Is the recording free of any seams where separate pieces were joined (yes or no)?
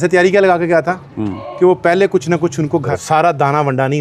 no